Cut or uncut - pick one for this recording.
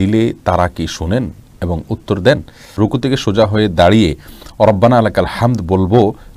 cut